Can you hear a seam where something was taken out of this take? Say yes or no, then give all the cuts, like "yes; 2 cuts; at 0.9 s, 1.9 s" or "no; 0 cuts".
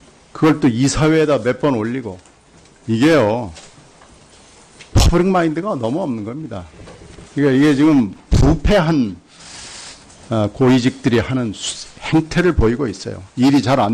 no; 0 cuts